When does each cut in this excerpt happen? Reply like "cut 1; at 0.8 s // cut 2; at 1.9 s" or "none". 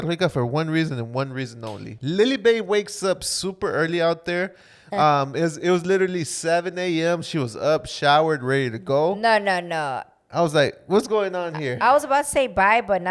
none